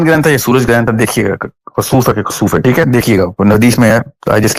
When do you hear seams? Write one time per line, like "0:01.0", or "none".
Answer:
none